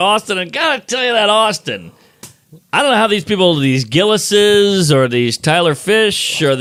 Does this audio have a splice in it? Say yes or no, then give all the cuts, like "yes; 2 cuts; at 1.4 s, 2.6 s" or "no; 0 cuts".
no; 0 cuts